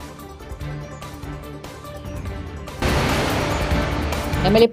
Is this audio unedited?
yes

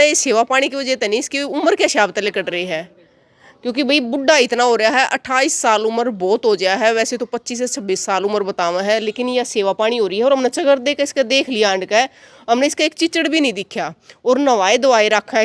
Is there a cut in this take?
no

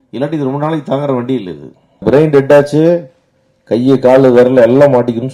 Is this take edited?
yes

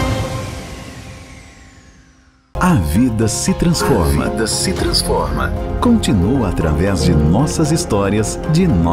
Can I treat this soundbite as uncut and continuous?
no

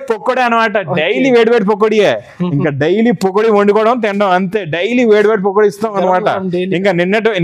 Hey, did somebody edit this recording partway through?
no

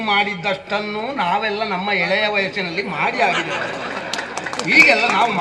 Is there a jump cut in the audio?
no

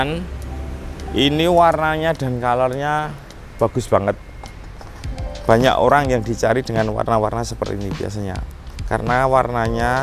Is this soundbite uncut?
yes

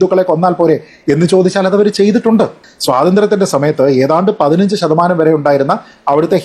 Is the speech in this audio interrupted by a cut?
yes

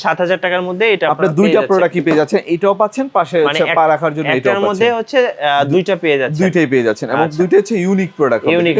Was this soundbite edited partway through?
no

